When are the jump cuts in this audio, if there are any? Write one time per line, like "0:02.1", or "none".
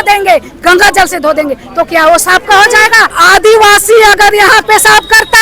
0:03.2